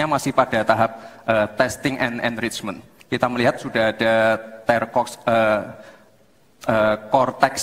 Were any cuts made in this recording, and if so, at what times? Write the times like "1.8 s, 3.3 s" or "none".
none

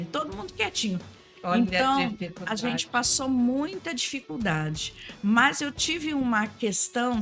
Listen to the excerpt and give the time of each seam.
1.1 s

